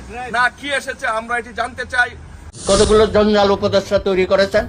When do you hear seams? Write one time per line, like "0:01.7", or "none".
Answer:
0:02.5